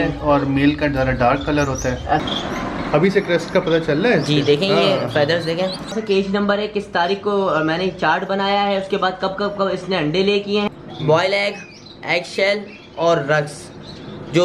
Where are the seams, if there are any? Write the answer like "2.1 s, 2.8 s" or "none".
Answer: 2.2 s, 6.0 s, 10.7 s